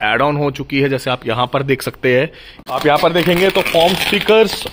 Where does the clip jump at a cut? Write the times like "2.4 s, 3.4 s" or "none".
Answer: 2.6 s